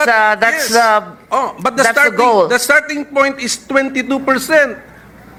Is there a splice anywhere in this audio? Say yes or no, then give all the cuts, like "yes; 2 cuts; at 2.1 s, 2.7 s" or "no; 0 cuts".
no; 0 cuts